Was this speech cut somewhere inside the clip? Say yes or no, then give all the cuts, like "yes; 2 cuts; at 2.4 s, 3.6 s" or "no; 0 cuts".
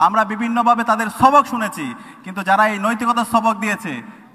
no; 0 cuts